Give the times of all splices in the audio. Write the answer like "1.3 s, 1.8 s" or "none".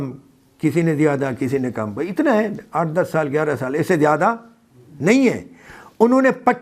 none

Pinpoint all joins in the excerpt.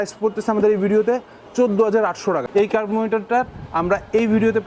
2.5 s

